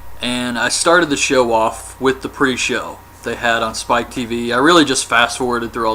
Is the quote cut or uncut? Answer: uncut